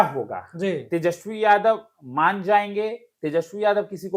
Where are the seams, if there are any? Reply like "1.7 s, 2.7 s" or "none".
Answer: none

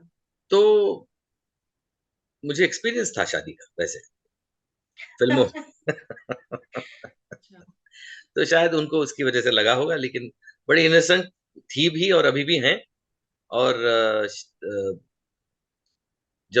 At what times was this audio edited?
none

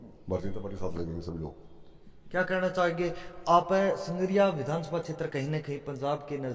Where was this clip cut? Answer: none

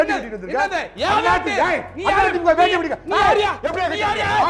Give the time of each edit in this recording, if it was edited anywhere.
none

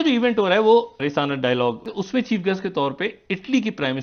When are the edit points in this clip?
1.9 s

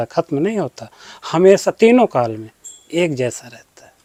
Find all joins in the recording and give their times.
none

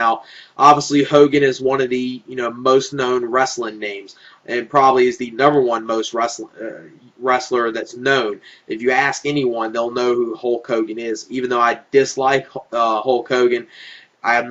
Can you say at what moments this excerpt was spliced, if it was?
none

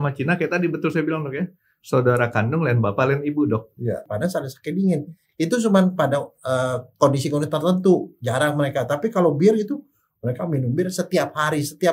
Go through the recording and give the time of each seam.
4.1 s

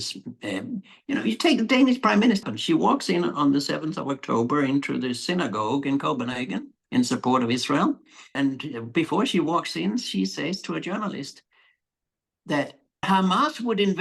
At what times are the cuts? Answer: 2.5 s, 8.3 s, 13.0 s

